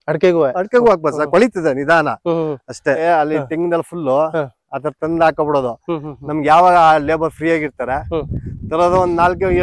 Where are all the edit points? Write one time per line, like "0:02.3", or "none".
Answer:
0:03.0